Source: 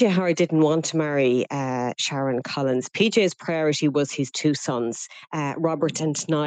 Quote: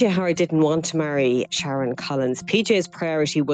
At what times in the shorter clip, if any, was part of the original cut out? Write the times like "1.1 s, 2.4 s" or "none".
1.5 s